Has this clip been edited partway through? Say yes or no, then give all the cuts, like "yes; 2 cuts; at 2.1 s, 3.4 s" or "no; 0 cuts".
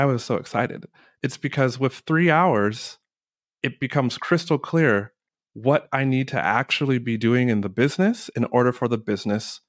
no; 0 cuts